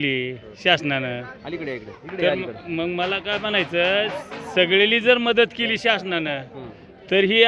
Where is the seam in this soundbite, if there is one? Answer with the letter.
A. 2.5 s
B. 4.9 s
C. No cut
C